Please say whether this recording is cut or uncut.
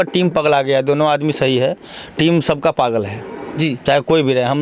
uncut